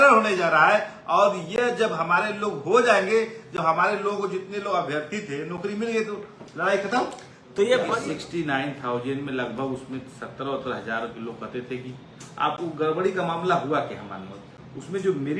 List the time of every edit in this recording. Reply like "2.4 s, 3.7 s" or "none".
7.9 s